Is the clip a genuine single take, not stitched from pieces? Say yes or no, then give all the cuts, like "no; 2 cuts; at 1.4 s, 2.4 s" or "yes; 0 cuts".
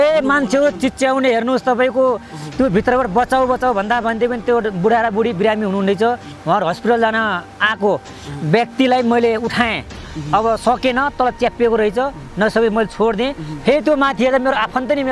yes; 0 cuts